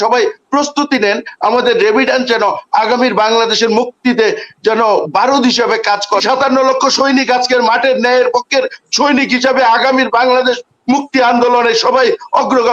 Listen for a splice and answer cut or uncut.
cut